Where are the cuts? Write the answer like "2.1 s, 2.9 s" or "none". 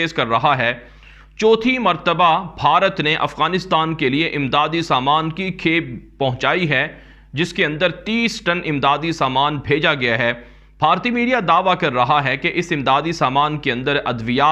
none